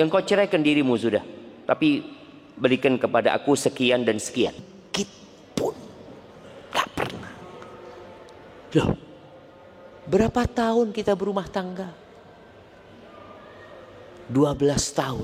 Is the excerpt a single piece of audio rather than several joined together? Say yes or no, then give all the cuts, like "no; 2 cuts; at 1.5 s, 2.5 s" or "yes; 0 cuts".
no; 1 cut; at 4.8 s